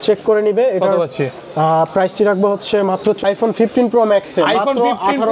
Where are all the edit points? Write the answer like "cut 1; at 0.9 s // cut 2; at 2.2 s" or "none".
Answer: cut 1; at 3.4 s

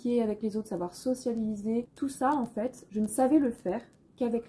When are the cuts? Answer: cut 1; at 1.9 s // cut 2; at 2.8 s

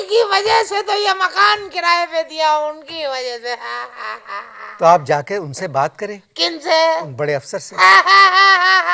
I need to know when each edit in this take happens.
none

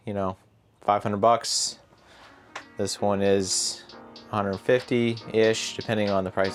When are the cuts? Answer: none

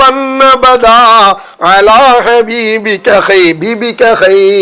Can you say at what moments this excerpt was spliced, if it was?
none

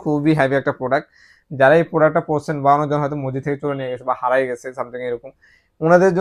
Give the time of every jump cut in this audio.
none

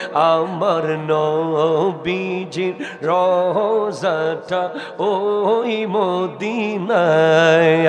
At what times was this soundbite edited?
none

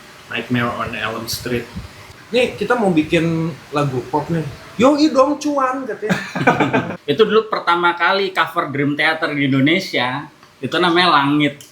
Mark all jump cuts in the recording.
cut 1; at 2.1 s // cut 2; at 6.9 s

